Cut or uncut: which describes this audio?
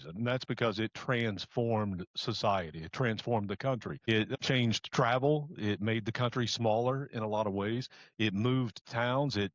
cut